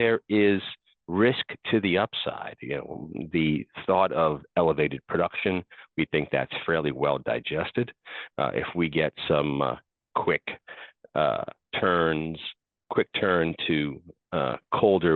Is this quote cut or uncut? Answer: uncut